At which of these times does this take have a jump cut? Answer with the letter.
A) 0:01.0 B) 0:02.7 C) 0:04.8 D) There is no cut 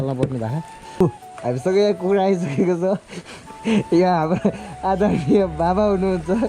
A